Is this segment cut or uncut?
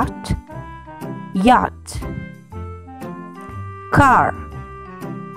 cut